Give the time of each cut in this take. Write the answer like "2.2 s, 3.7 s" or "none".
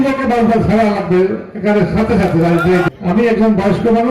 2.9 s